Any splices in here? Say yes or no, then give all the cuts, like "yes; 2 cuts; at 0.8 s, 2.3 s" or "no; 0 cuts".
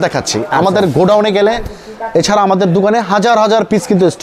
no; 0 cuts